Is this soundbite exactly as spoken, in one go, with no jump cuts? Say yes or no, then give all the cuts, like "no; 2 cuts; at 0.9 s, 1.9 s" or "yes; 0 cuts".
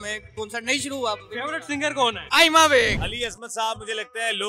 no; 2 cuts; at 2.2 s, 3.0 s